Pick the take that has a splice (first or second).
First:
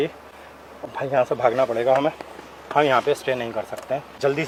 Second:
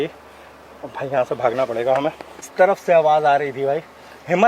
second